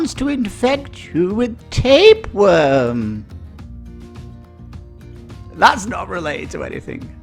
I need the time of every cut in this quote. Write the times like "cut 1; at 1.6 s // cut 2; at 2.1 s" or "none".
none